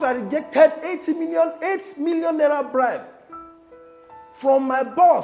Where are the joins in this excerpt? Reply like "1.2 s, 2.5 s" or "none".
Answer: 3.2 s, 4.4 s

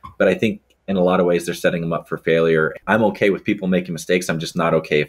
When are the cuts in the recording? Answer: 2.7 s

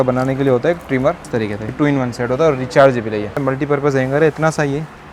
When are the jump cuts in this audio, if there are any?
1.7 s, 3.4 s

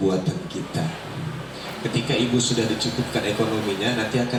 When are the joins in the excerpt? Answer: none

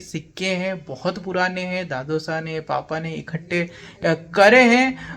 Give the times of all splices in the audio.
none

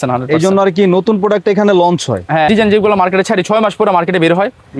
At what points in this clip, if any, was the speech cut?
2.5 s

